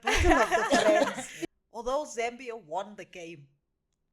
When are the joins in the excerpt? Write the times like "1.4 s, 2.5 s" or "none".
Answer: 1.3 s